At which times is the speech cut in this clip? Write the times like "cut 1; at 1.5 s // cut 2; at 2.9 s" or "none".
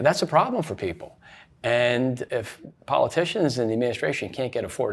cut 1; at 2.2 s